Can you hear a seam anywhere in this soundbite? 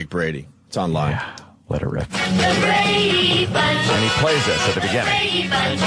yes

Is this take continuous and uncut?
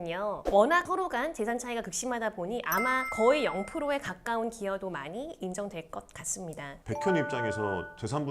no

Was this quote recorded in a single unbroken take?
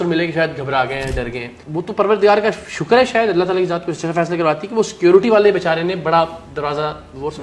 yes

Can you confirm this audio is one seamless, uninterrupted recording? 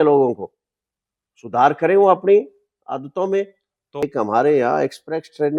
no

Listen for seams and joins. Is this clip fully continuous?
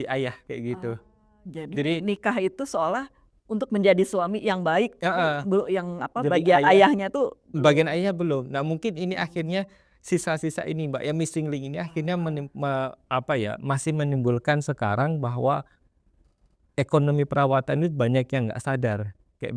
yes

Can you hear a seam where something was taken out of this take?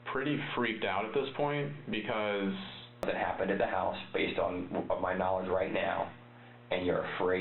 yes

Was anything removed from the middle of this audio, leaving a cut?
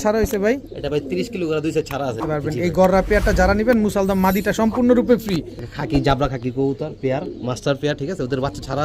yes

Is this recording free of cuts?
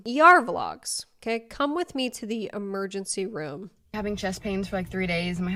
yes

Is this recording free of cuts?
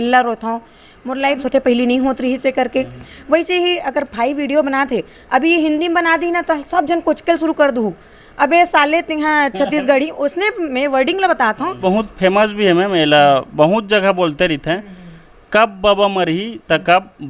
no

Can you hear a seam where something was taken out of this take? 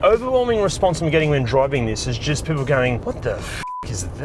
yes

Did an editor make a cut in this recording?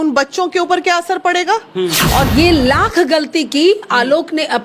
yes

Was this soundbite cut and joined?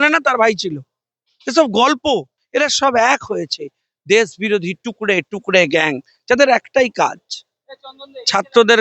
yes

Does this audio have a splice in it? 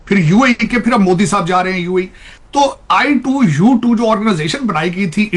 no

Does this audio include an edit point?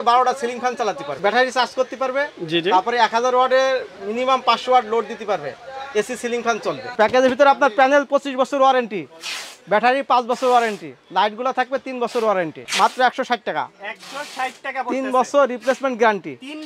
yes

